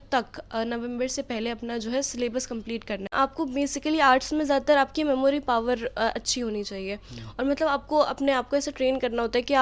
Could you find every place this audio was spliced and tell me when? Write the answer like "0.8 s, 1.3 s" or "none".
3.1 s